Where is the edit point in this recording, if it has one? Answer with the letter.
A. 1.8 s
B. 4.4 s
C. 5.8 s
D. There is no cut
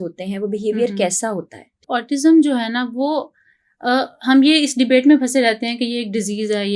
A